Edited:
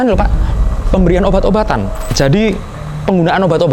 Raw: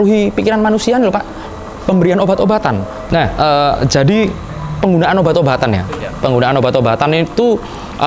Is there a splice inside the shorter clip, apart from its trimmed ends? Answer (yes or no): yes